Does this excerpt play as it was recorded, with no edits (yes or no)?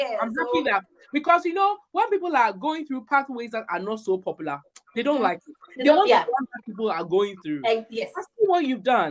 yes